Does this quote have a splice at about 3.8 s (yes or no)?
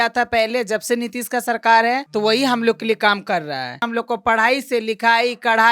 yes